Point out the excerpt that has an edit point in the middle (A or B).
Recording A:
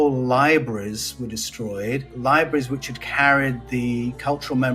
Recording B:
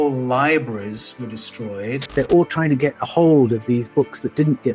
B